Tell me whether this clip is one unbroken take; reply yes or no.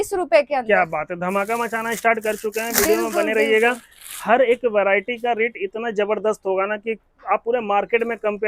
yes